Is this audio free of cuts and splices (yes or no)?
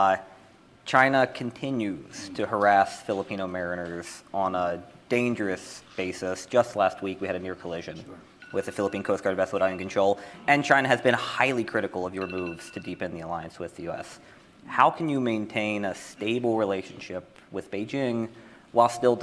yes